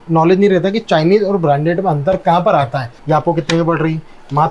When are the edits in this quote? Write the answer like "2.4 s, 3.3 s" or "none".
2.9 s